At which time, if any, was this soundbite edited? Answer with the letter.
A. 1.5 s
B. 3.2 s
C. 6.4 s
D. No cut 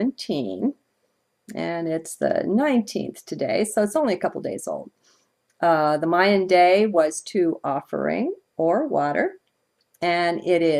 A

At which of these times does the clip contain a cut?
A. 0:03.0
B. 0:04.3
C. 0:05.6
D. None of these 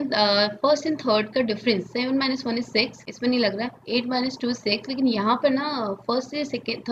A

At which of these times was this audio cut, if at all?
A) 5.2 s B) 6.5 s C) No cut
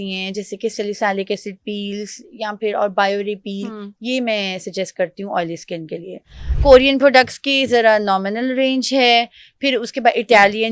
B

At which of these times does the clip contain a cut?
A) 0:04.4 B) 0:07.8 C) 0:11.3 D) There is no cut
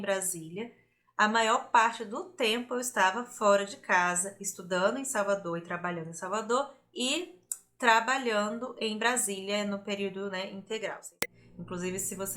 C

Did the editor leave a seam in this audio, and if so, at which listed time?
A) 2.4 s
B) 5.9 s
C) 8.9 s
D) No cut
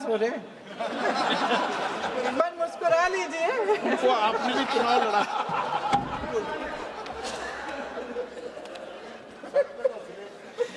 D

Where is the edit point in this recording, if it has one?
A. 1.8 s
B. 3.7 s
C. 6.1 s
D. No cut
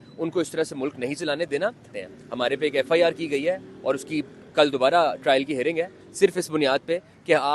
A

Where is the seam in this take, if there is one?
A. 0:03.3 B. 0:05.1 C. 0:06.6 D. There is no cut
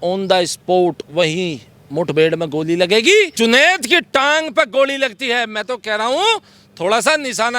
A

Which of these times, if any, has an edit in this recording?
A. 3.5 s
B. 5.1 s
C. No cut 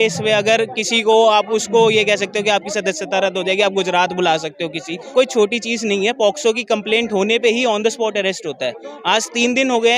B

